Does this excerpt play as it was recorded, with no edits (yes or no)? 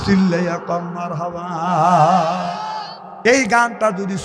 no